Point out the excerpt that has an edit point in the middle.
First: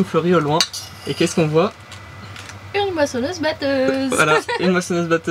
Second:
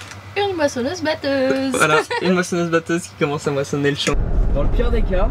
second; 1 cut; at 4.1 s

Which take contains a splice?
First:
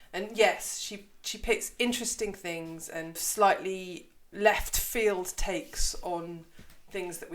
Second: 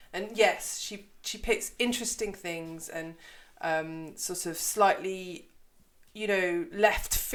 first; 2 cuts; at 3.2 s, 4.3 s

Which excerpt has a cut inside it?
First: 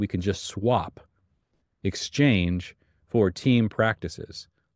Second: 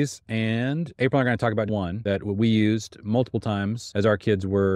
second; 3 cuts; at 0.9 s, 1.8 s, 3.8 s

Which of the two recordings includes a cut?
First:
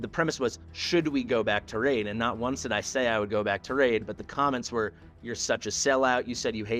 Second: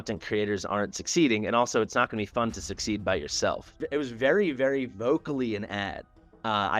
second; 1 cut; at 3.8 s

